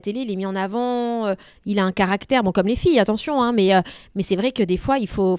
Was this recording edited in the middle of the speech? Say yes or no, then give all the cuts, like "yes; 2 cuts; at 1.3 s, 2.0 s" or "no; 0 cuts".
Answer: no; 0 cuts